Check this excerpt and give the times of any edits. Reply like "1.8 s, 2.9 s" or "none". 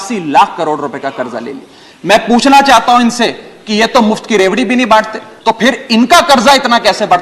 5.2 s